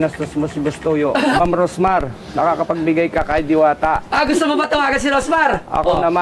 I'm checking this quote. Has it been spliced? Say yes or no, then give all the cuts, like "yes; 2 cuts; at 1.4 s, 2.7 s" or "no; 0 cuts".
yes; 1 cut; at 1.4 s